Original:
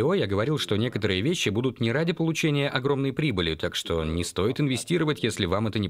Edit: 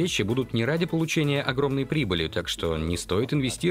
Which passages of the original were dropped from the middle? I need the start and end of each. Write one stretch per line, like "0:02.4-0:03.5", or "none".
none

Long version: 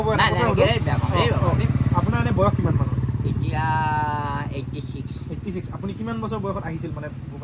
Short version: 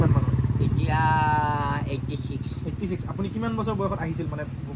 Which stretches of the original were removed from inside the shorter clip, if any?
none

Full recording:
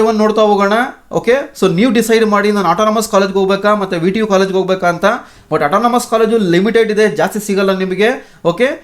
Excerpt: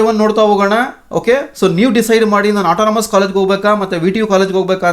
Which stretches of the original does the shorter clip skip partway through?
none

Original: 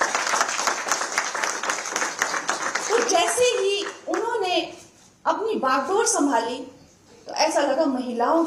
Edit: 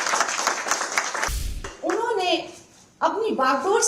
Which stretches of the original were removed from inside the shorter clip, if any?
0:01.9-0:03.9

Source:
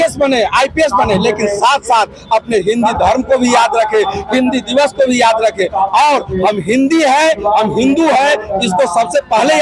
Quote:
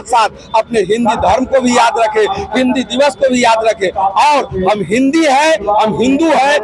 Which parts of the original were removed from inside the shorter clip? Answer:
none

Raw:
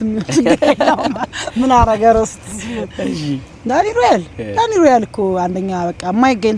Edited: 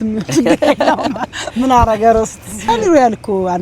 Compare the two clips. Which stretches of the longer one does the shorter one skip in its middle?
0:02.5-0:04.4

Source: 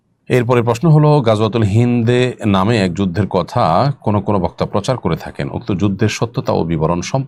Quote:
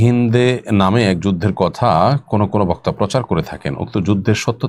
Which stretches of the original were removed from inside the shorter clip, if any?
none

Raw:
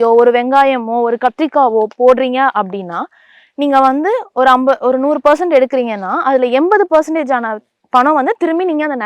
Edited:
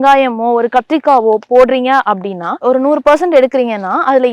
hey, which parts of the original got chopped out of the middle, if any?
0:03.1-0:04.8

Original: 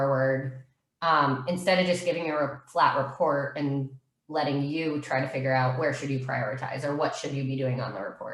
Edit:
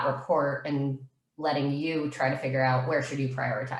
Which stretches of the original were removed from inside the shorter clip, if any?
none

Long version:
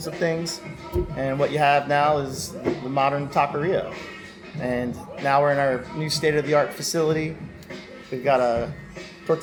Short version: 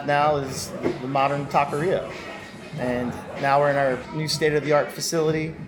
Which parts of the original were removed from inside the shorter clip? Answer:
none

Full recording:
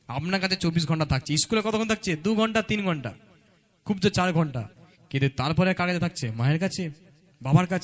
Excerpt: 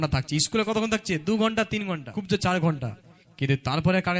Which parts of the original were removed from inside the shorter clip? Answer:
0:03.1-0:03.8

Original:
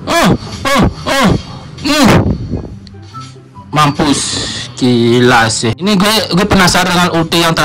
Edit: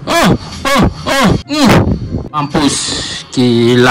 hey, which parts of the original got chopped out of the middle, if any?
0:01.5-0:01.9
0:02.8-0:03.8

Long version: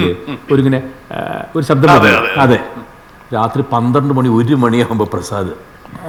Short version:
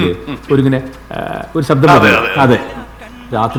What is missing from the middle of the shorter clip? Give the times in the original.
none

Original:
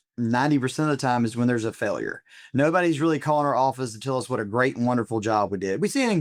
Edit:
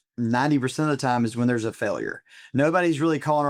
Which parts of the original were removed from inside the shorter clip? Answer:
none

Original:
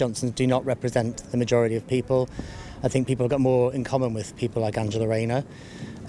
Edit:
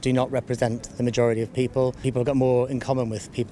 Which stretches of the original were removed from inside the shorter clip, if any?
0:02.4-0:03.1

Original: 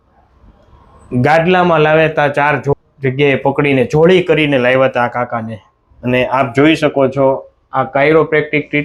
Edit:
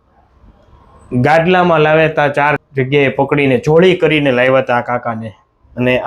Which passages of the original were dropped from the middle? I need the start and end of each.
0:02.6-0:02.9

